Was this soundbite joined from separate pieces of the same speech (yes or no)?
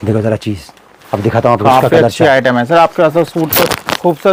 no